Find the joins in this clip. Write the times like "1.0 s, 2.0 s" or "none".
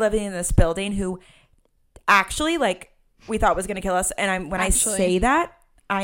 none